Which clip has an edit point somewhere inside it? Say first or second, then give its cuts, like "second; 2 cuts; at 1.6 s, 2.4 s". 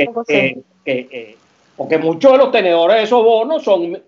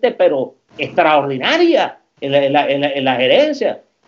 first; 1 cut; at 1.1 s